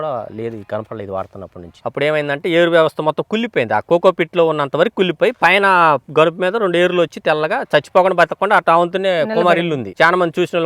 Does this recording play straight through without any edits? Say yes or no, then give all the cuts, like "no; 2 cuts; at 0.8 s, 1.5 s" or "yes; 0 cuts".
no; 1 cut; at 1.7 s